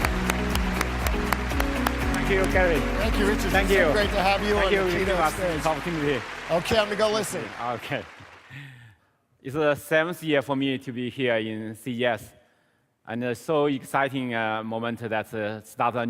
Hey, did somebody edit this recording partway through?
no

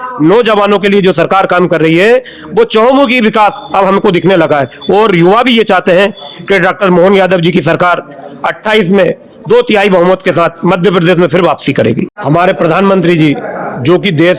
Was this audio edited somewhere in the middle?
yes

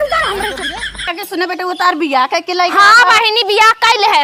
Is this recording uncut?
no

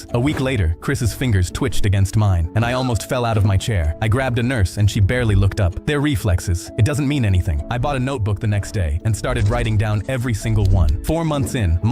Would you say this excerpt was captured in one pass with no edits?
no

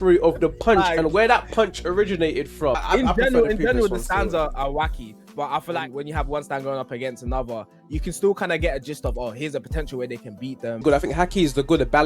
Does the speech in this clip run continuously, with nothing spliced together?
no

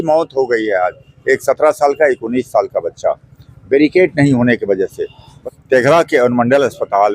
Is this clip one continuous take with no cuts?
no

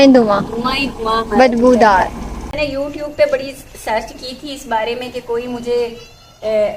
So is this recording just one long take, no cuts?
no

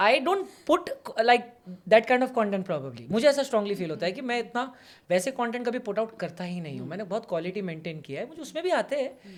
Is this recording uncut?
yes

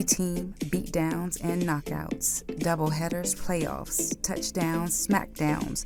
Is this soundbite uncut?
yes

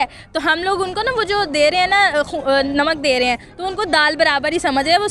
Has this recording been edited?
no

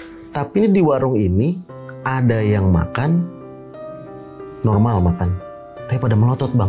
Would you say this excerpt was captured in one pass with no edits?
yes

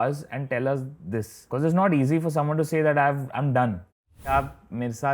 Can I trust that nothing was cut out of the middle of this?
no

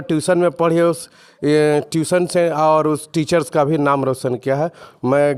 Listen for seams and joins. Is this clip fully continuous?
yes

